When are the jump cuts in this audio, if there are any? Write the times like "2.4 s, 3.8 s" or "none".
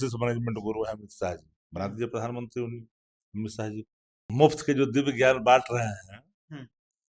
4.1 s